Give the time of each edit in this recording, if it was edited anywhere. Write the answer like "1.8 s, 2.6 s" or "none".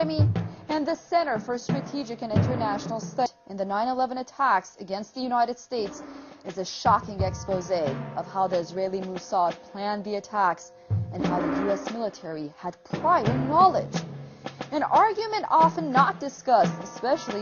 none